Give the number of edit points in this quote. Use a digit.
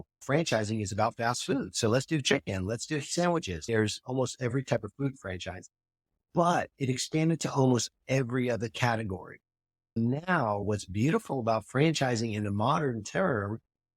2